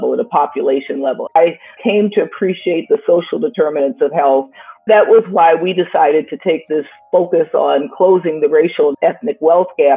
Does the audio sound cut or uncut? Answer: cut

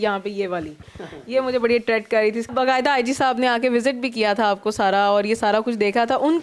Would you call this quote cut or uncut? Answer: cut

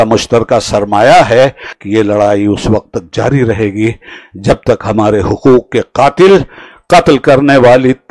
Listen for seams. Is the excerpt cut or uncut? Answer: cut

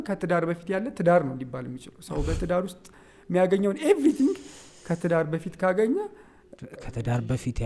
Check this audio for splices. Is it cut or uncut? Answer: uncut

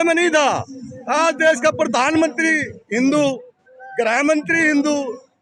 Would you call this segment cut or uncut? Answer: uncut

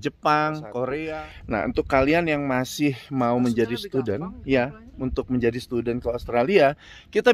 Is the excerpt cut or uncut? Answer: cut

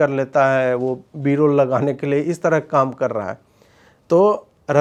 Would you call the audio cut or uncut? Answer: uncut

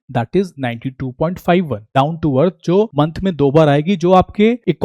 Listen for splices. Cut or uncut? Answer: cut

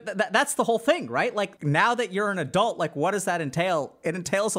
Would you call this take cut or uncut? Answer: cut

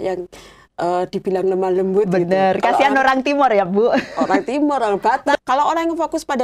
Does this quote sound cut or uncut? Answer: cut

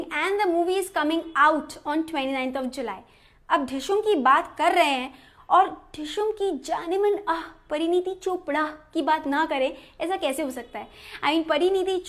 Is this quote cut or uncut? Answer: uncut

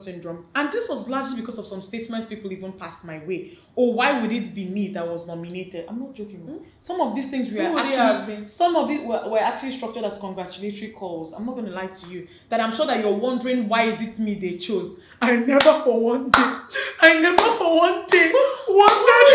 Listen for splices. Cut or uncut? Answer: uncut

